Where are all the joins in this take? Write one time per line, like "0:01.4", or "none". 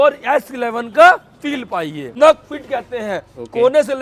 0:02.1